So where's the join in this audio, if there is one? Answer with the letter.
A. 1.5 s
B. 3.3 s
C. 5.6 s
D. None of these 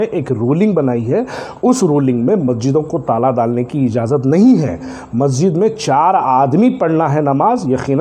D